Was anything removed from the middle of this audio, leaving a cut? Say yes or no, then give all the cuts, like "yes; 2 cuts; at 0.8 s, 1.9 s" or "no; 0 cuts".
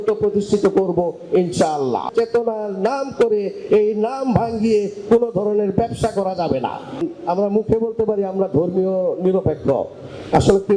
yes; 2 cuts; at 2.1 s, 7.0 s